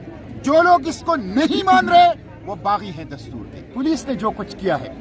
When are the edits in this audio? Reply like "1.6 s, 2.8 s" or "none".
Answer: 3.6 s